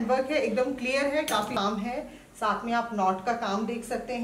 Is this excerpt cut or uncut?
cut